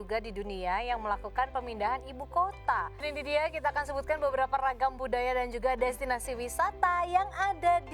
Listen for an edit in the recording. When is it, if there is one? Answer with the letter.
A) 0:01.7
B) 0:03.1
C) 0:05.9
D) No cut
B